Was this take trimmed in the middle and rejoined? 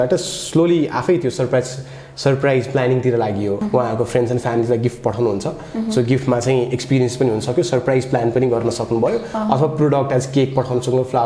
yes; 1 cut; at 3.6 s

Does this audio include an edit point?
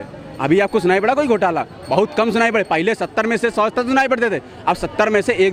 no; 0 cuts

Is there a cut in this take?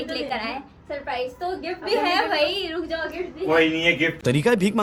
no; 0 cuts

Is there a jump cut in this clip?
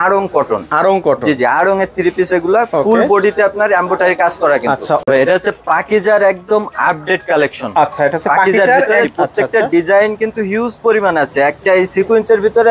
yes; 2 cuts; at 5.0 s, 9.1 s

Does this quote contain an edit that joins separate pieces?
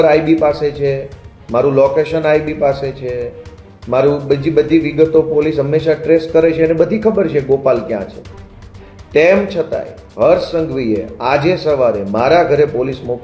no; 0 cuts

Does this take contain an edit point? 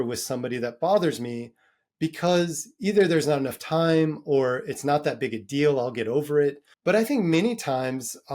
yes; 1 cut; at 6.7 s

